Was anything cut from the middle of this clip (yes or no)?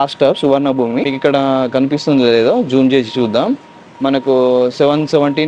yes